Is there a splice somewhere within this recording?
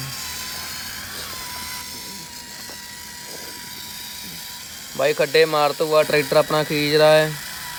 no; 0 cuts

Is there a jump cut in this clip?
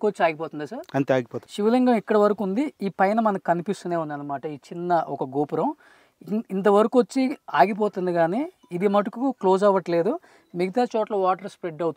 yes; 1 cut; at 1.4 s

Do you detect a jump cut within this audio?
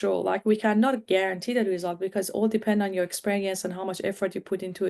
no; 0 cuts

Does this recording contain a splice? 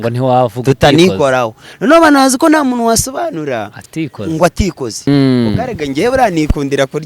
yes; 1 cut; at 5.1 s

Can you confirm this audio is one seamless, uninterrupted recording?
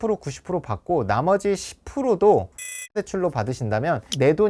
yes; 0 cuts

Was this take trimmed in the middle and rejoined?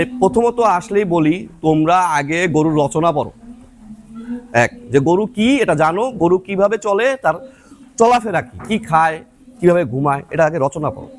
no; 0 cuts

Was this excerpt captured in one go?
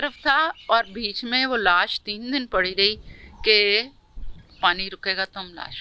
yes; 0 cuts

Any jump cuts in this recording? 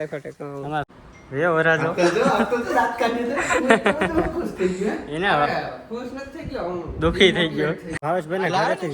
yes; 2 cuts; at 0.9 s, 8.0 s

